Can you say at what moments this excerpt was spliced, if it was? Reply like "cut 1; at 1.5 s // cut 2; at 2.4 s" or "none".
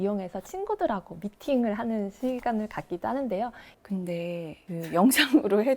cut 1; at 3.7 s